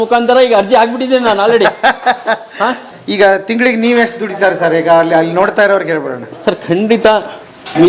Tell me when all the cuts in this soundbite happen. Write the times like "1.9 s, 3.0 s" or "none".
2.8 s